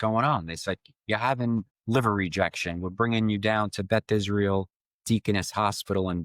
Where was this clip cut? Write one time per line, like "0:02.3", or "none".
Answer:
0:01.7